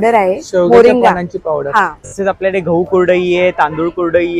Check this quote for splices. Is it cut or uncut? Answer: cut